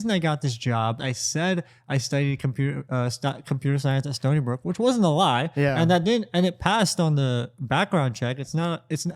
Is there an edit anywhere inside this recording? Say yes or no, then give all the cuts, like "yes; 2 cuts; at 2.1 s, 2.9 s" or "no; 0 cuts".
yes; 1 cut; at 1.0 s